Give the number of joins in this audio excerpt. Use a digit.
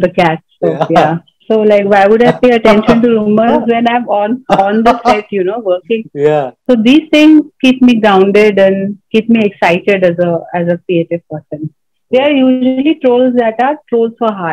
3